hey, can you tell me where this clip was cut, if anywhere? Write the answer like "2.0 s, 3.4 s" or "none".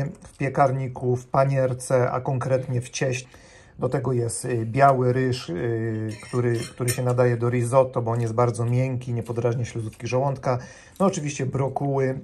3.2 s